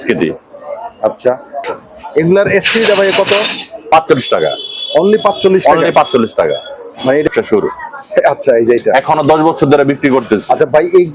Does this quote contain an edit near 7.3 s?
yes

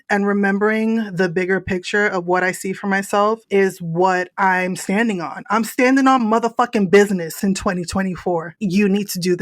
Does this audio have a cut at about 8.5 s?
yes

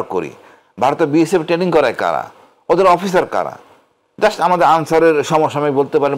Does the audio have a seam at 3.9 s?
no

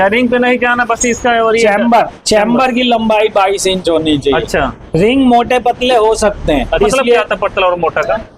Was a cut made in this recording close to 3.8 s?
no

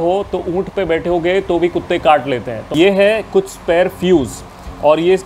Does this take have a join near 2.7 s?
yes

